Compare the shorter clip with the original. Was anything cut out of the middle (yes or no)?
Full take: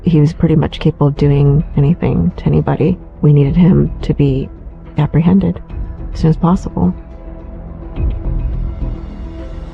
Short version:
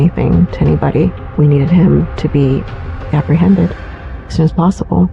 no